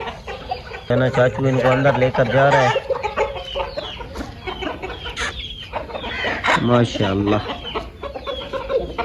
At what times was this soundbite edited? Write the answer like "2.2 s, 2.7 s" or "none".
0.9 s

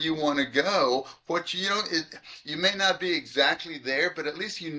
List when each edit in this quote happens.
none

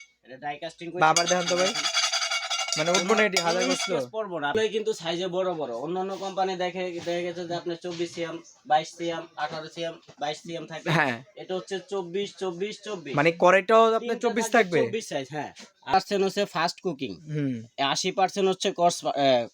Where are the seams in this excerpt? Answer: 4.6 s, 15.9 s

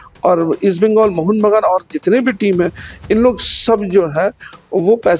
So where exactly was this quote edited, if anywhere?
none

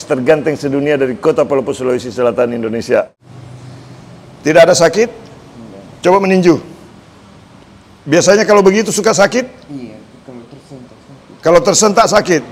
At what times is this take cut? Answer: 3.1 s

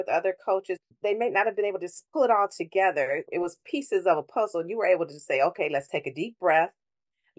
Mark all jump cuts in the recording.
0.9 s, 1.9 s, 3.3 s

